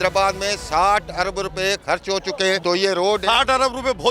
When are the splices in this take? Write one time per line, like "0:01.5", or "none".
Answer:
0:02.6